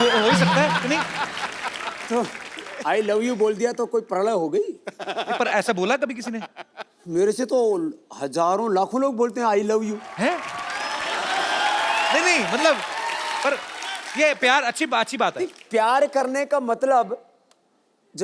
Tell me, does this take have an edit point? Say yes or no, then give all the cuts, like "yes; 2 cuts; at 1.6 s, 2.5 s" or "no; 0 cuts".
no; 0 cuts